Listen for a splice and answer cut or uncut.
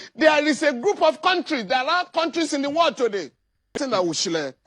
cut